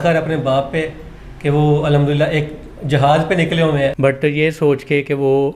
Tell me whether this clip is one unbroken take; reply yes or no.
no